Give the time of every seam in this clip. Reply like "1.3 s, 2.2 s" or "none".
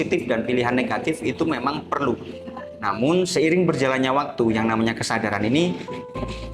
none